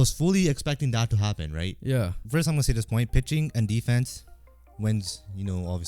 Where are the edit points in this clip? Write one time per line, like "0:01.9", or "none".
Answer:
0:02.2